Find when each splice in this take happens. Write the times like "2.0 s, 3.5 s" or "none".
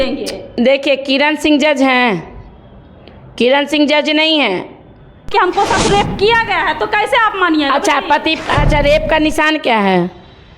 5.2 s